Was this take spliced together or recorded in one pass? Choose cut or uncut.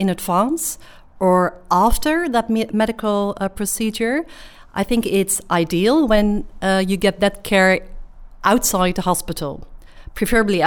uncut